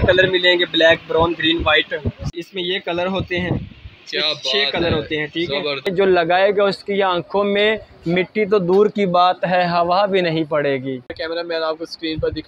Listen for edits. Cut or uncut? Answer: cut